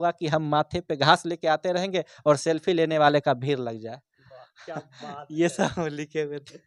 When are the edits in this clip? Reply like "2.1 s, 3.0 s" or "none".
none